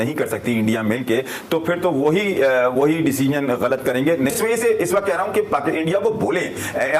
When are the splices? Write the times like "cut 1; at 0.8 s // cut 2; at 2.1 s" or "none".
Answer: cut 1; at 4.3 s